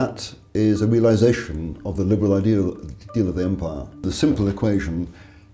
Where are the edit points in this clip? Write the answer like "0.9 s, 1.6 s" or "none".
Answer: 4.0 s